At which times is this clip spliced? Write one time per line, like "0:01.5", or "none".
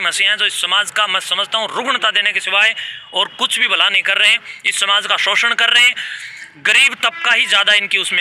none